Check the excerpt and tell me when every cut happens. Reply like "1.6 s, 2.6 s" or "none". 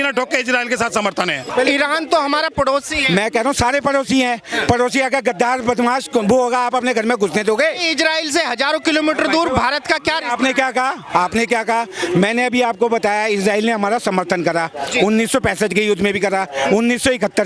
1.5 s